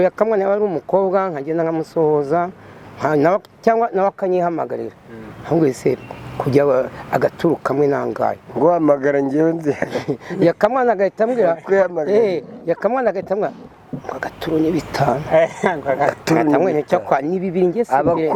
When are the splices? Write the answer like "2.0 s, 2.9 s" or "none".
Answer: none